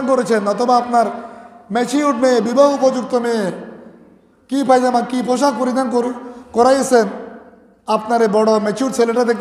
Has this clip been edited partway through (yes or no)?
no